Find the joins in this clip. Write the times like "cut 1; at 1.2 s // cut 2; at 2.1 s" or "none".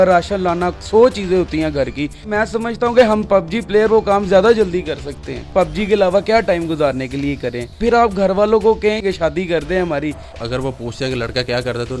cut 1; at 2.3 s // cut 2; at 5.4 s // cut 3; at 7.7 s // cut 4; at 9.0 s // cut 5; at 10.3 s